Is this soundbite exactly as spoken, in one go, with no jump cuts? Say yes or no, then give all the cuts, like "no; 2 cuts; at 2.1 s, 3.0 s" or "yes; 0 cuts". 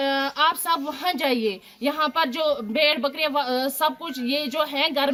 yes; 0 cuts